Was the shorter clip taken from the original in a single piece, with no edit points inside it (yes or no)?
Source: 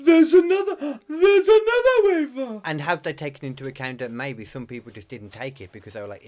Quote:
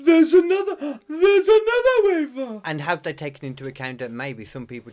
yes